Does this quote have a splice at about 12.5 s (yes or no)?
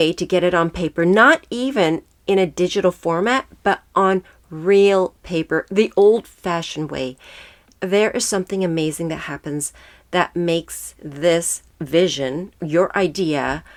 no